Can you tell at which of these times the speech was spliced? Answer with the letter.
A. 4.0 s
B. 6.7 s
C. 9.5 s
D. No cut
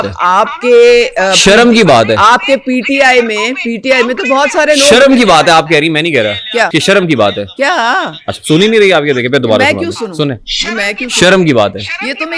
B